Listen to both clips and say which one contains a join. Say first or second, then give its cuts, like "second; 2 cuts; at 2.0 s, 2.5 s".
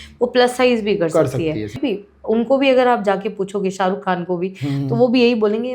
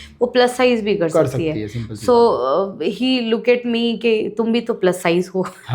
first; 1 cut; at 1.8 s